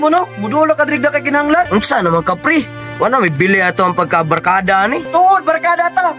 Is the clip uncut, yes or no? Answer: no